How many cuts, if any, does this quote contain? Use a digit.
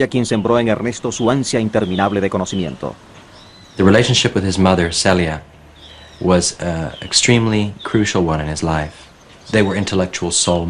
1